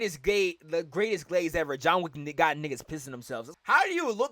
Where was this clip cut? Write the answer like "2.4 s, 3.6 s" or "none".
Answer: 3.4 s